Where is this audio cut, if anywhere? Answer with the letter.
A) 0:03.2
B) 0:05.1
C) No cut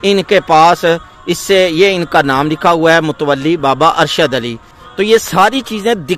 B